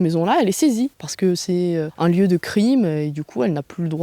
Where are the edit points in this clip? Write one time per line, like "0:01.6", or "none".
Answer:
0:01.0
0:01.9